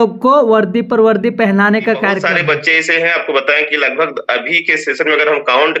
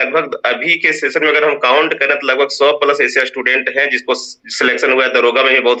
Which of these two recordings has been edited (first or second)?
first